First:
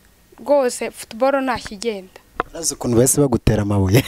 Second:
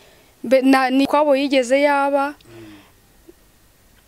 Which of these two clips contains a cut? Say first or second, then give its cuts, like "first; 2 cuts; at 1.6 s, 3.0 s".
second; 1 cut; at 1.1 s